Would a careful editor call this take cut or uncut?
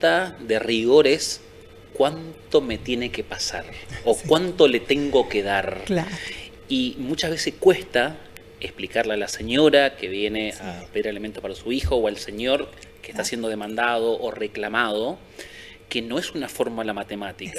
uncut